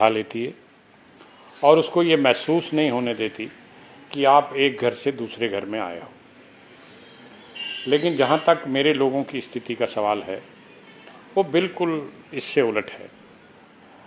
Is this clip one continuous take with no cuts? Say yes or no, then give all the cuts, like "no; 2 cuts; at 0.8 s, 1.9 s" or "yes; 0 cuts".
yes; 0 cuts